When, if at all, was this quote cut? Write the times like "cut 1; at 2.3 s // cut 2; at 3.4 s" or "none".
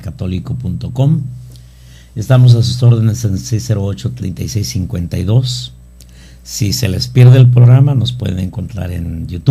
cut 1; at 4.7 s